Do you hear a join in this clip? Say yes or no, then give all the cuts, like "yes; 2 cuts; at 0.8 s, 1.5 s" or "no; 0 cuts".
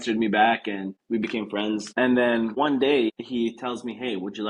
yes; 4 cuts; at 0.9 s, 1.9 s, 2.5 s, 3.2 s